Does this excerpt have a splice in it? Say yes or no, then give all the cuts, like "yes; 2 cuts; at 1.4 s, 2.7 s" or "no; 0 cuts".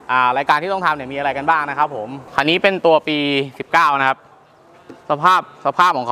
yes; 1 cut; at 2.2 s